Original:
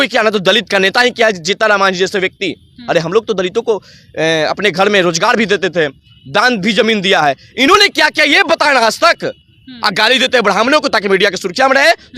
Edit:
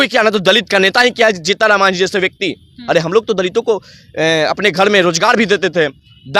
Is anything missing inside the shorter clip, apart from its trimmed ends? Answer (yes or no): no